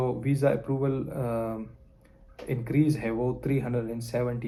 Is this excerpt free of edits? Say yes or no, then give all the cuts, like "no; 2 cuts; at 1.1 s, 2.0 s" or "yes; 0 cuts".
yes; 0 cuts